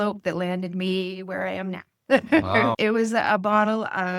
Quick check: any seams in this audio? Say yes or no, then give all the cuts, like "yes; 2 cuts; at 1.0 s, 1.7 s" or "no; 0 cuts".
yes; 1 cut; at 2.7 s